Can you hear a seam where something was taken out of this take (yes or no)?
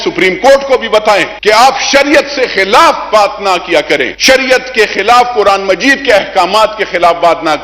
yes